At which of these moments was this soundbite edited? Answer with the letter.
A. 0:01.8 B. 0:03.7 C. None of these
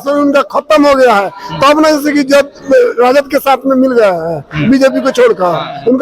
C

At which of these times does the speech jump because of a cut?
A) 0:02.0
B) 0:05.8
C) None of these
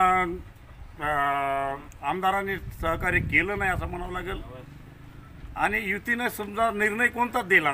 C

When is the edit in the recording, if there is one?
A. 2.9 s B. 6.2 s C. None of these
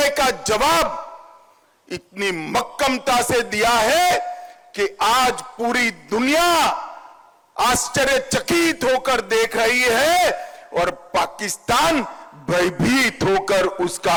C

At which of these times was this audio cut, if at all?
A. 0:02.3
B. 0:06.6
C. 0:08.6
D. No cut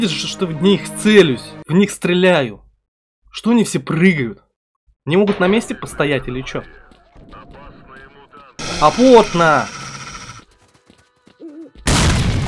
C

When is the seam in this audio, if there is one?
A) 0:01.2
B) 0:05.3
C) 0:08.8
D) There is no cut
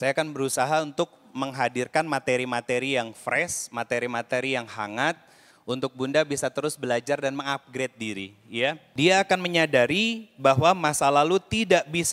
C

